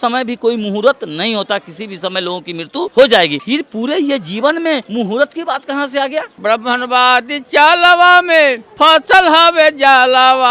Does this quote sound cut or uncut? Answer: cut